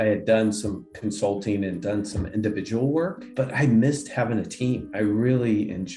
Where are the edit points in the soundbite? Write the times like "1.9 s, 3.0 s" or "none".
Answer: 3.3 s, 4.9 s